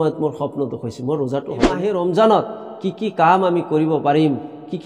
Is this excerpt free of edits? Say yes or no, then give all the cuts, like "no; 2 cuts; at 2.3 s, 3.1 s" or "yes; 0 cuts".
no; 1 cut; at 1.9 s